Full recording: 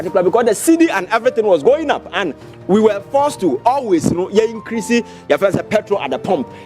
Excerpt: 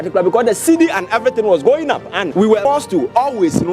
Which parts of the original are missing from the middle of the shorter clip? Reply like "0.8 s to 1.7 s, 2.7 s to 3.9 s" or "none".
2.5 s to 3.0 s

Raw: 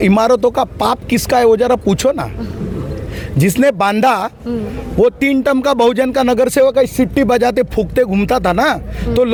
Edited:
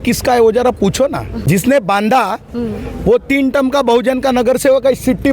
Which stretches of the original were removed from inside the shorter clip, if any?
2.4 s to 3.3 s

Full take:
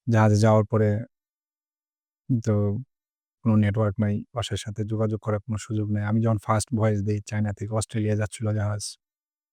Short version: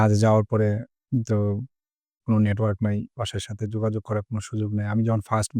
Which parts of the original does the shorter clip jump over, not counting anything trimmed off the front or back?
1.1 s to 2.1 s

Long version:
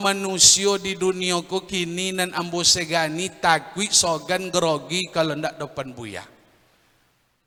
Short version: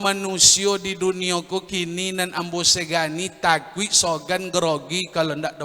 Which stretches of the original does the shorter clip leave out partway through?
none

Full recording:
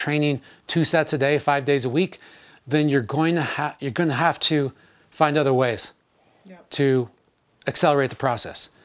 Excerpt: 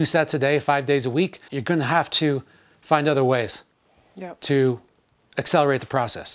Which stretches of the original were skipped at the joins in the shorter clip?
2.3 s to 3.8 s

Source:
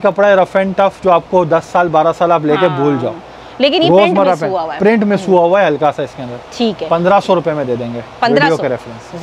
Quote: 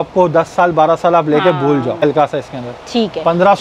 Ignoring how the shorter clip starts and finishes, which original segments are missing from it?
3.2 s to 5.7 s

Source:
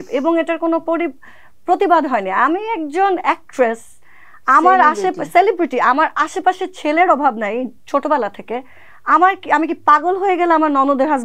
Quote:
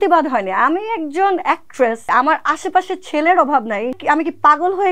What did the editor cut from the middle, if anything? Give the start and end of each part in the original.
3.8 s to 5.8 s, 7.7 s to 9.4 s

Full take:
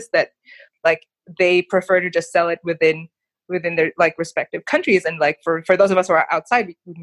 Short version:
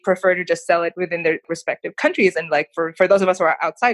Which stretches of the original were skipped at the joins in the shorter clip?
2.8 s to 3.8 s

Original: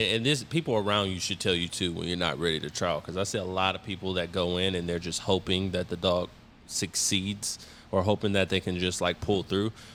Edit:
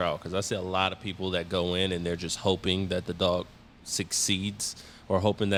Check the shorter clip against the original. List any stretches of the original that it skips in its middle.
none

